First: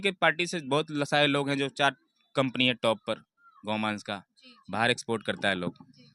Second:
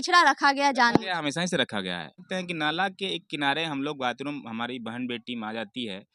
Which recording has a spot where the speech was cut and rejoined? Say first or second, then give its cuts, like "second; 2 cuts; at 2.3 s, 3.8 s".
second; 1 cut; at 2.2 s